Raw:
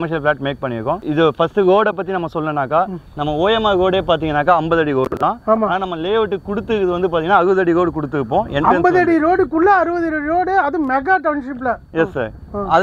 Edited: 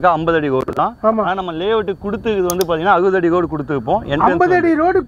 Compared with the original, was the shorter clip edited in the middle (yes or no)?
no